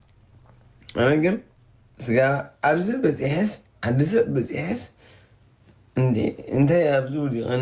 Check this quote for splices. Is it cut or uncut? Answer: uncut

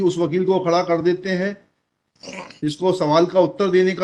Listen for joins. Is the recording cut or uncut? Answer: uncut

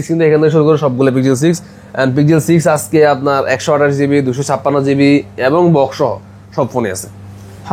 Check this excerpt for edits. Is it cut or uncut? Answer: uncut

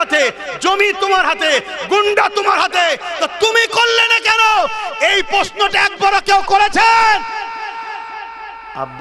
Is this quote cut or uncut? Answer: uncut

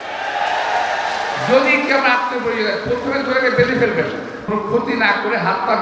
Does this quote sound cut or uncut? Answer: cut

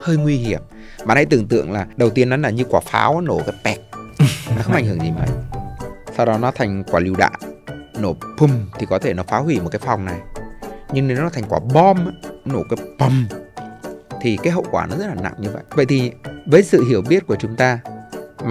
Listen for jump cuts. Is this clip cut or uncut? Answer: cut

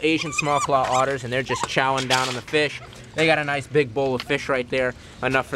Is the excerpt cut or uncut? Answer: uncut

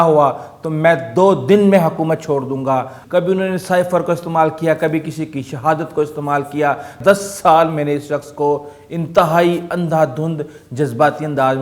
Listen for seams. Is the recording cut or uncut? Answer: cut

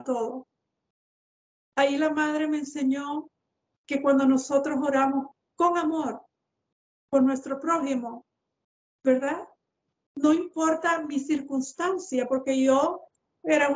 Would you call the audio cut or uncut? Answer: uncut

